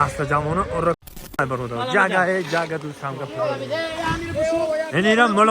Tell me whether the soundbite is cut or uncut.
cut